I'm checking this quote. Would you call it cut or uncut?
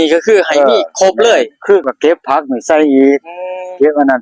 cut